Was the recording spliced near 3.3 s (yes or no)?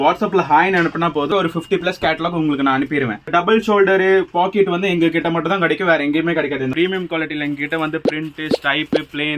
yes